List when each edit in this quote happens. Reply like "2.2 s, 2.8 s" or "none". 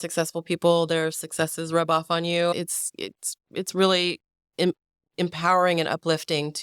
none